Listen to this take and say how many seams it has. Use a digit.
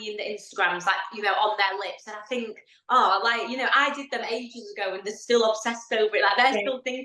0